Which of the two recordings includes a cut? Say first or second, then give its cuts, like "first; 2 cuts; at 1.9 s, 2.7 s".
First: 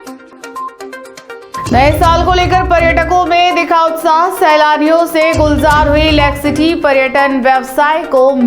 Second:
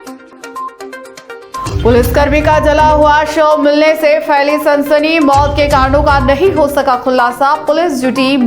second; 1 cut; at 1.7 s